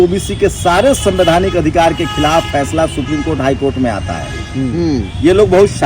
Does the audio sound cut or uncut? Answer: cut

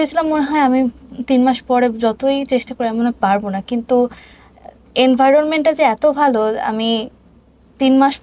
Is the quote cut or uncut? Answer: uncut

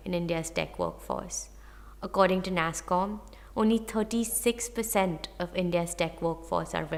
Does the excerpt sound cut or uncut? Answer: uncut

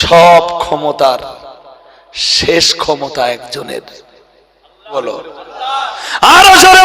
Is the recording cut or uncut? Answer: cut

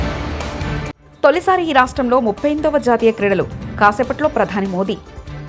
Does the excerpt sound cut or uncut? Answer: cut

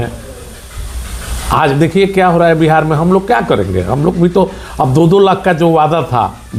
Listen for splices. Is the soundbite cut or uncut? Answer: uncut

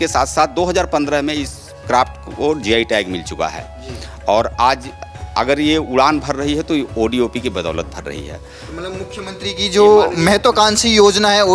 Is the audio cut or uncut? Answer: uncut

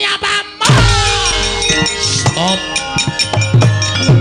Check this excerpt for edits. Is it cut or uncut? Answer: cut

